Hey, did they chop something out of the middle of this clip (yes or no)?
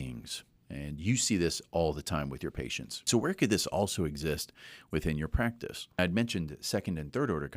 yes